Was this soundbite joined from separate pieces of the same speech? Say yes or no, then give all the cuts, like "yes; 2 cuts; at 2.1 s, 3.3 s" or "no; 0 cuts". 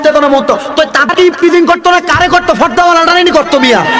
yes; 1 cut; at 1.1 s